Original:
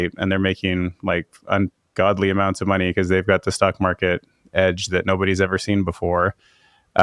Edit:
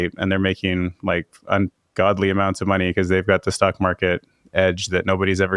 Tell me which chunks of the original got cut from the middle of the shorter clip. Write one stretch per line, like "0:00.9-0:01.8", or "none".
none